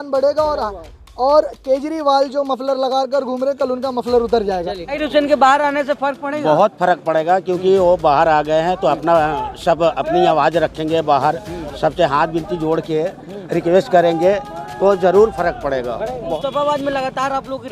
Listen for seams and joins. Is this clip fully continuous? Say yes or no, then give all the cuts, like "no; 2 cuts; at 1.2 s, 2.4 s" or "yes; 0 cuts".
no; 2 cuts; at 5.0 s, 16.1 s